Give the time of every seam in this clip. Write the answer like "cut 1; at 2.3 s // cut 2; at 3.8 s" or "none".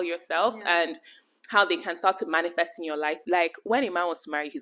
cut 1; at 3.2 s